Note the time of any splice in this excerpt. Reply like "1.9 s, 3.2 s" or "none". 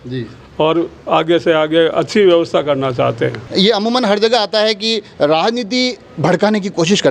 3.4 s